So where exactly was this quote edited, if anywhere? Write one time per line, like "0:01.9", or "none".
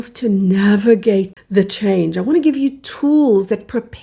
0:01.4